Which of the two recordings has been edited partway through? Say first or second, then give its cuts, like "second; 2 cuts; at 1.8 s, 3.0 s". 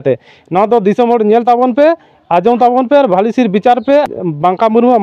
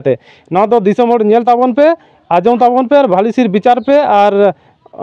first; 1 cut; at 4.1 s